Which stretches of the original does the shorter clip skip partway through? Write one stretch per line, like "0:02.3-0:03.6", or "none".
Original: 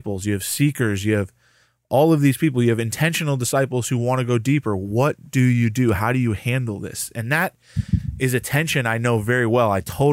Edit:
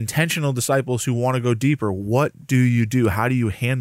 none

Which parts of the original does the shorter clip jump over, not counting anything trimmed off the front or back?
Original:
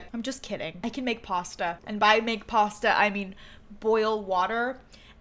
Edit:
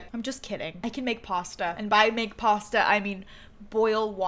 0:01.8-0:01.9

